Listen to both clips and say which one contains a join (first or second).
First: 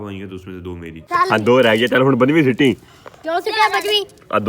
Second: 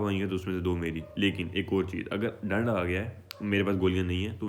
first